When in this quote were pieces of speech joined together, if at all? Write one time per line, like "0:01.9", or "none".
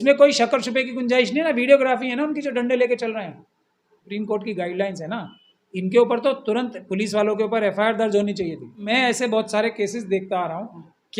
0:04.0
0:08.9